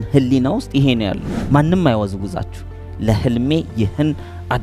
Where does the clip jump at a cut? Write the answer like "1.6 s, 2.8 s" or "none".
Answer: 1.3 s